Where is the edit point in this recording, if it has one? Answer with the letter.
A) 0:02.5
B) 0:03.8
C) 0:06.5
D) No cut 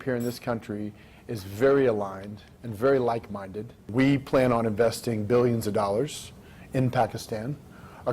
B